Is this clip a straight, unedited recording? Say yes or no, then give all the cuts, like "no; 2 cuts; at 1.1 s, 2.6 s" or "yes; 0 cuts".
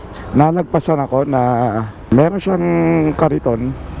no; 1 cut; at 2.1 s